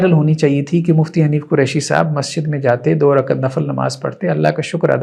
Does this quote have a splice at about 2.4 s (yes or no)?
no